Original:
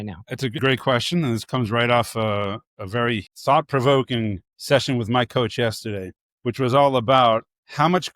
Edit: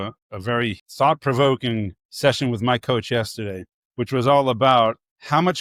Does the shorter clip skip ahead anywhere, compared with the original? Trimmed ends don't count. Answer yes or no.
no